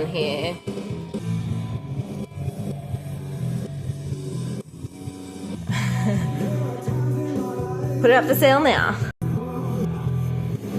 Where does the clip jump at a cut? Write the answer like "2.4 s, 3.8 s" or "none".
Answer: none